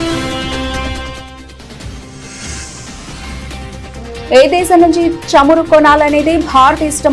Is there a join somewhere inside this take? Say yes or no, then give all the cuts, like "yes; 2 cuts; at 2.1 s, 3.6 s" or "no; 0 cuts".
no; 0 cuts